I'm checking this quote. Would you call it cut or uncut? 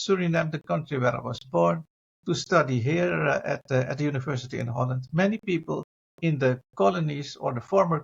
uncut